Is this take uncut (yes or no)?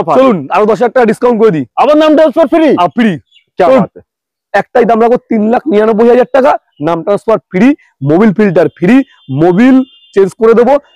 yes